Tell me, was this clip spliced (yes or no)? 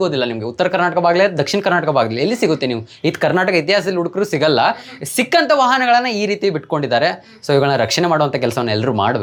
no